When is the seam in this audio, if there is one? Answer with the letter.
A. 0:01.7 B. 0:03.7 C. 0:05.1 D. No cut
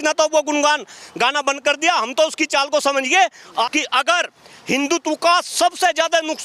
B